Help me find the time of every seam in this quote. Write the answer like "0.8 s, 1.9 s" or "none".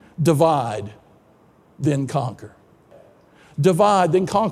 2.9 s